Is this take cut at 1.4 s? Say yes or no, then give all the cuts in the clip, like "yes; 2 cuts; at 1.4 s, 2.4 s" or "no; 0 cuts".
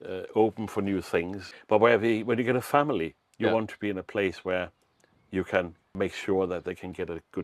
yes; 2 cuts; at 1.4 s, 6.0 s